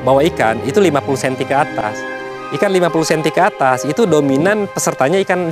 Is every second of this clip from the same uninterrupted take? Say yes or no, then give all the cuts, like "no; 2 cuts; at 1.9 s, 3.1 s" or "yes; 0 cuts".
yes; 0 cuts